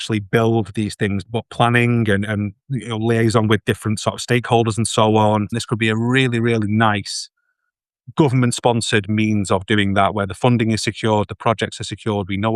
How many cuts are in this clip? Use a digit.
2